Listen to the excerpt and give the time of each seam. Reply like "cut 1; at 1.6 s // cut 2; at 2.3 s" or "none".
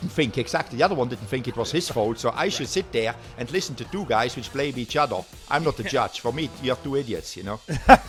none

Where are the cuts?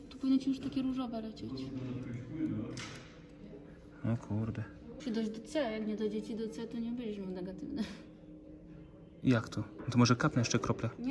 cut 1; at 4.9 s // cut 2; at 9.8 s

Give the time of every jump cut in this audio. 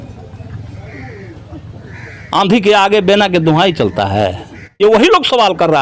cut 1; at 4.8 s

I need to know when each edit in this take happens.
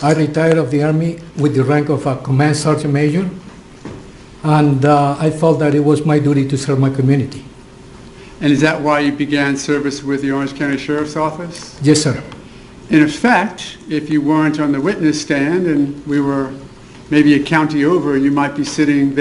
none

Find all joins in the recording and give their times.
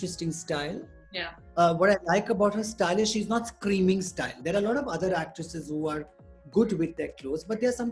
none

